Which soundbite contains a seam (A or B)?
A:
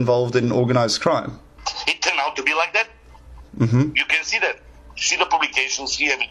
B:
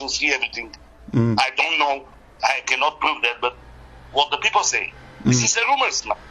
A